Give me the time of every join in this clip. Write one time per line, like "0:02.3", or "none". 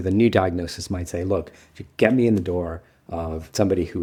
none

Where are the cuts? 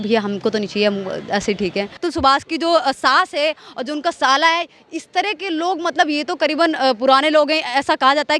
0:02.0

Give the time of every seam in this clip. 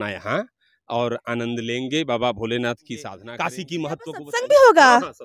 0:03.2

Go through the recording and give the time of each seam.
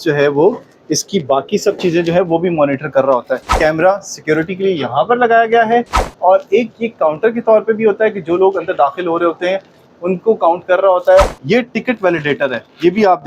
0:03.5
0:11.3

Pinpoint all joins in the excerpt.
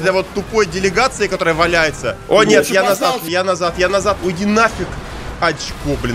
0:02.1
0:04.2

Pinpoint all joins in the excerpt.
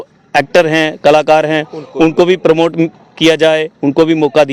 none

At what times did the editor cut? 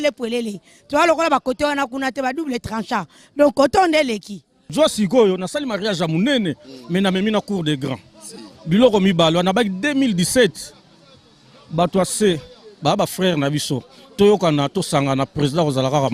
0:04.6

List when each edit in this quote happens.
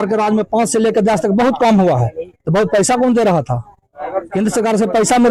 none

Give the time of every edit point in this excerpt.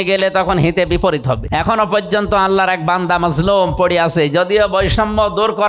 0:01.4

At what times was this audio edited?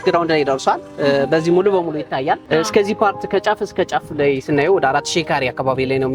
0:02.4

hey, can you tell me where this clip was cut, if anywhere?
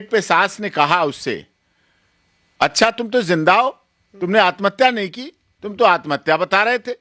none

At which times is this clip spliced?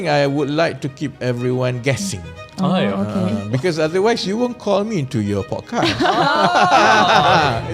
none

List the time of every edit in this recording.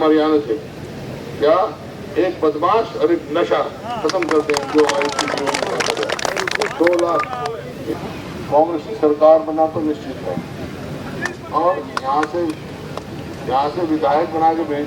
0:07.9

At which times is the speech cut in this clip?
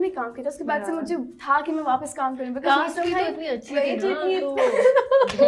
none

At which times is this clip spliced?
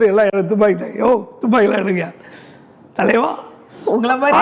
none

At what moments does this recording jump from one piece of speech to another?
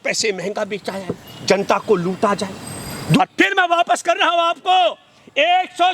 0:03.2

